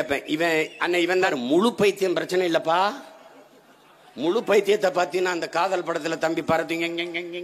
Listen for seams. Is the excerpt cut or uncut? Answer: cut